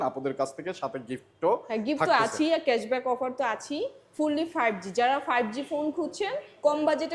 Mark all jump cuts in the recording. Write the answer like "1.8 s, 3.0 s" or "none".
none

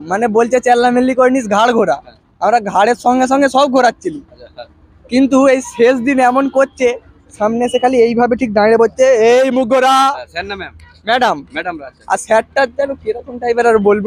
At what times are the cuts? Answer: none

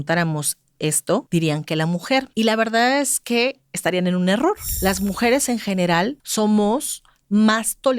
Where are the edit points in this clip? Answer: 1.3 s, 2.3 s, 4.7 s, 6.2 s

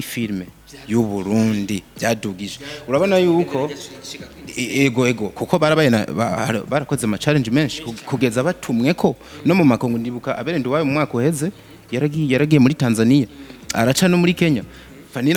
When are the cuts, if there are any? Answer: none

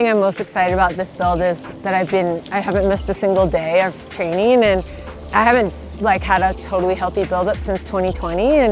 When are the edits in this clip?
none

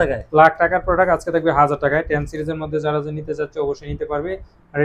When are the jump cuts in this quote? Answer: none

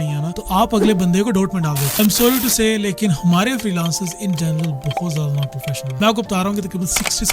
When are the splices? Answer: 1.9 s

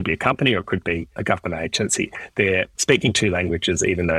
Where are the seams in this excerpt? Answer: 1.2 s, 2.8 s

